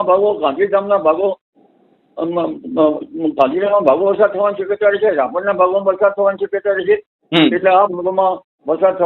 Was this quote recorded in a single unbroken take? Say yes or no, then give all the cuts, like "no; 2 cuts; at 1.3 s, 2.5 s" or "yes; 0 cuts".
yes; 0 cuts